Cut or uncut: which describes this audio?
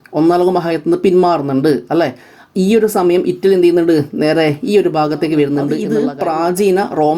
cut